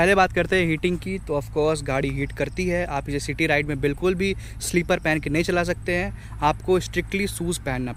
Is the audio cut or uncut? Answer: uncut